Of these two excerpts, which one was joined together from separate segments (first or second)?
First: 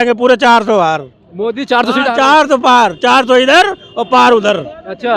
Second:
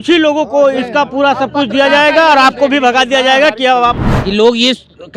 second